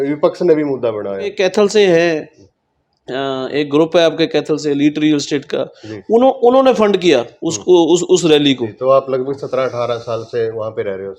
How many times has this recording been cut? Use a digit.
2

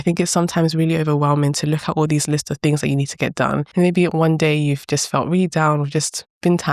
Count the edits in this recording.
1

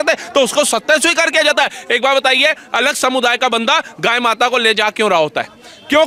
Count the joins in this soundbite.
0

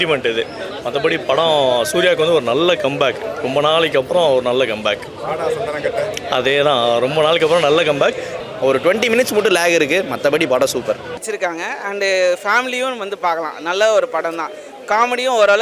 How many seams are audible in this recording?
2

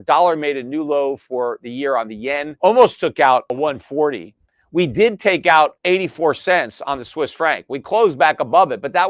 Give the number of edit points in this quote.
3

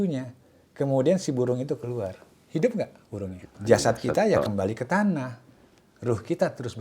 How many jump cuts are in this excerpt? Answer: 1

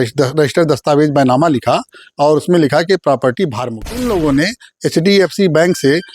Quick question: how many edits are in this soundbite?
1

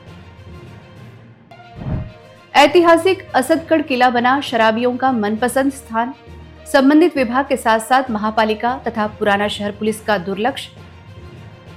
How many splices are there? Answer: 0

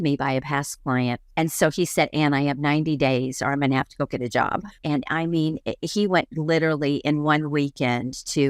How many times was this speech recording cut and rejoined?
2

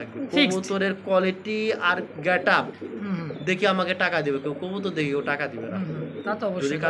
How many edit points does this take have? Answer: 0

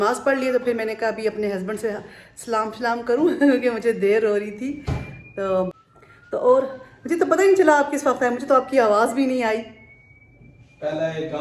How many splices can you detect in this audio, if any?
0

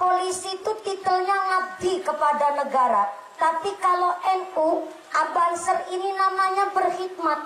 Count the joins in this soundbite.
0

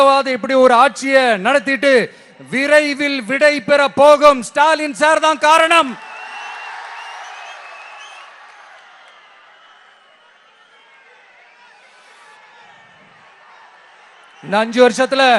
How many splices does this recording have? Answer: 0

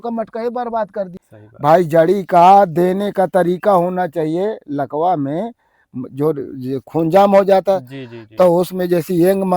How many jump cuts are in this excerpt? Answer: 1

